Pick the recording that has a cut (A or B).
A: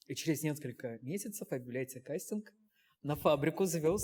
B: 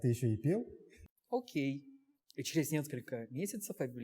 B